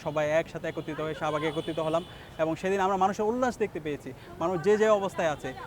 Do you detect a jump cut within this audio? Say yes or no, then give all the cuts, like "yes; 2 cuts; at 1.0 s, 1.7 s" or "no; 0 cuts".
no; 0 cuts